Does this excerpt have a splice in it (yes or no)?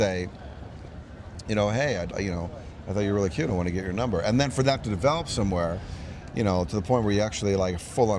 no